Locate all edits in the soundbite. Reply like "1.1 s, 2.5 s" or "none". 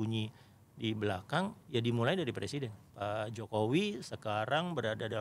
2.9 s